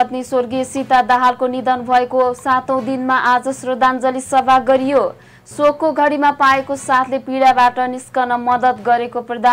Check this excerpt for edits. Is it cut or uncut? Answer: uncut